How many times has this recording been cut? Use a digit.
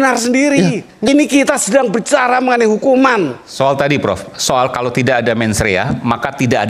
1